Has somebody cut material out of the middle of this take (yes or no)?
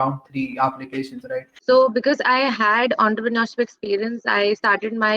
yes